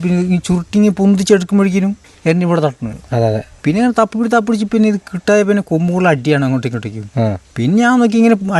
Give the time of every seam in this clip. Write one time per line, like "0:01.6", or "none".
0:02.1
0:03.5
0:07.4

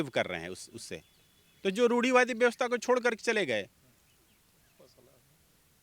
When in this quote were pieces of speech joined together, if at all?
none

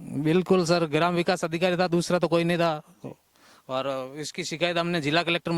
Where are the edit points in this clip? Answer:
none

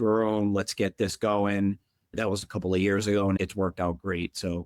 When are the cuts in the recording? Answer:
0:02.1

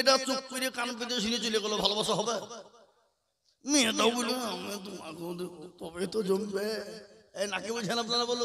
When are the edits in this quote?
none

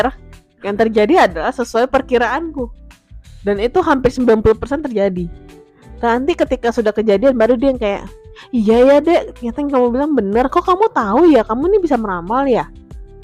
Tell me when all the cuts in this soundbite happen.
none

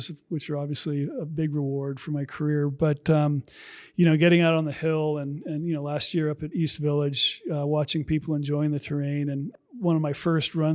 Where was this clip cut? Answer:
0:09.5

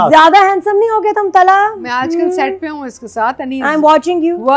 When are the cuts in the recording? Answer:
none

